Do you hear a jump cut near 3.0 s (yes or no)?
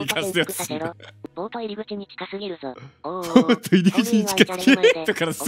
no